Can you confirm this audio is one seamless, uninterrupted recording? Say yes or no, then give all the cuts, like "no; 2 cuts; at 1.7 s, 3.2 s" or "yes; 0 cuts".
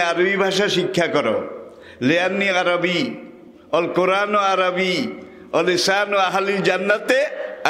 yes; 0 cuts